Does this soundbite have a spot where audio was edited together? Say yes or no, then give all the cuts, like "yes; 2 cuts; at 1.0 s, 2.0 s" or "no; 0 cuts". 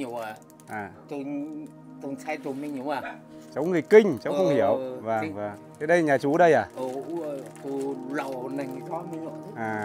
no; 0 cuts